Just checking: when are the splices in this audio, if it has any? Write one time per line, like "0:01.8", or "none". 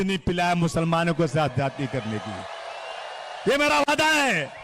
none